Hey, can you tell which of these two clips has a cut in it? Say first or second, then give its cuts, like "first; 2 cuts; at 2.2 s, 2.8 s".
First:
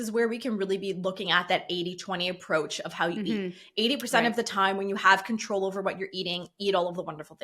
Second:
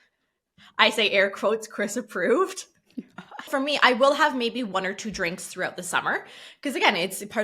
second; 1 cut; at 3.5 s